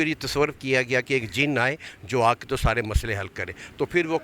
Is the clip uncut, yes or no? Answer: yes